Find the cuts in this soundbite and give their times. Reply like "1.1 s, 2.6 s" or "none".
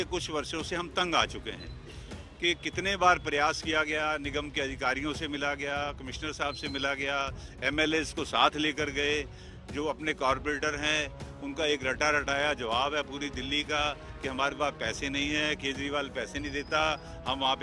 none